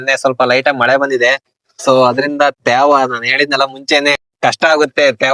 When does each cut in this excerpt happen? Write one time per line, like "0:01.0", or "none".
0:04.3

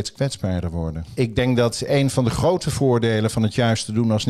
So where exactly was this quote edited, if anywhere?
0:01.0

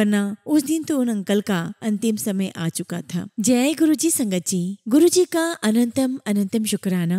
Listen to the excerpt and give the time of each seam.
0:03.3

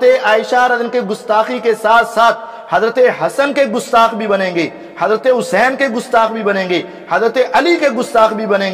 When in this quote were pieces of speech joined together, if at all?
none

